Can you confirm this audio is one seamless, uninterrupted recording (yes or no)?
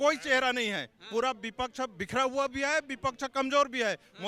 yes